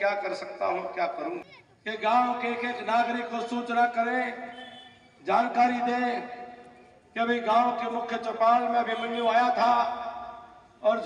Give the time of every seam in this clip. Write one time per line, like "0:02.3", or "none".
0:01.4